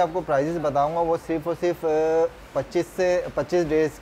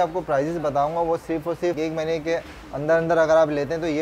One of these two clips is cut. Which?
second; 1 cut; at 1.8 s

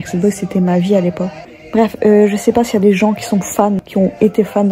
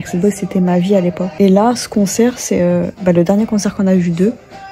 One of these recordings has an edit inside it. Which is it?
first; 2 cuts; at 1.3 s, 3.8 s

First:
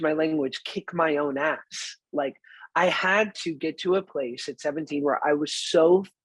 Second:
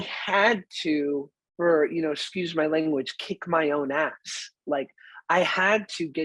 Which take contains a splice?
second; 1 cut; at 1.4 s

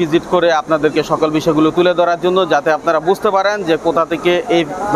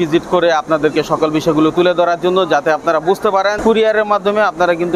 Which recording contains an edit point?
second; 1 cut; at 3.6 s

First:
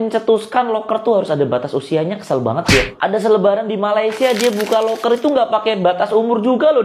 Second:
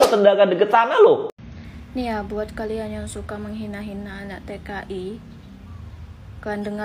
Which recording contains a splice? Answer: second; 1 cut; at 1.2 s

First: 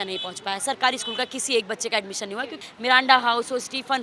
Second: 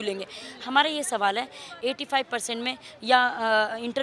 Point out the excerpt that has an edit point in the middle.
first; 1 cut; at 2.6 s

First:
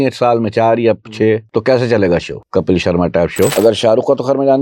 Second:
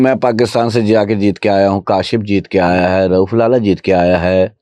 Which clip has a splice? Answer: first; 3 cuts; at 1.5 s, 2.4 s, 3.5 s

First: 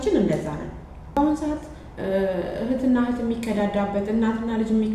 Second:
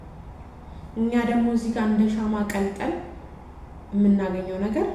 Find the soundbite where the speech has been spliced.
first; 1 cut; at 1.2 s

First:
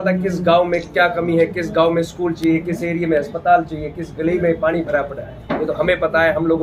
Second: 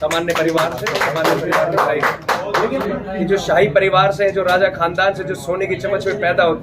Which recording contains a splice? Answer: second; 1 cut; at 2.8 s

